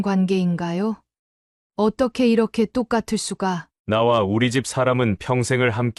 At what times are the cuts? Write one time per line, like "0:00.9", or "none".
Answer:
0:03.7